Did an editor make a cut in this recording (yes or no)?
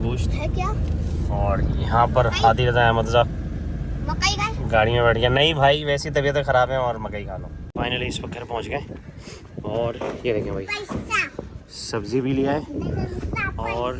no